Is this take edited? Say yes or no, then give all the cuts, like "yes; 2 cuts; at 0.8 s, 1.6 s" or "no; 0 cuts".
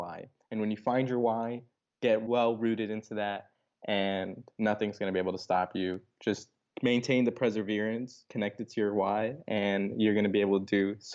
no; 0 cuts